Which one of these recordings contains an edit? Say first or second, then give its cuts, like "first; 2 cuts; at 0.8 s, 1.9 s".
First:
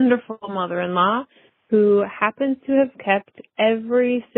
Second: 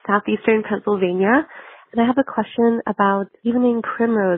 second; 1 cut; at 3.3 s